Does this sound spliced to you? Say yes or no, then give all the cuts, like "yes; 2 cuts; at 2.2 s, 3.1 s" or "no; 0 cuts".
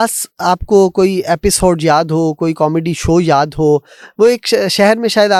no; 0 cuts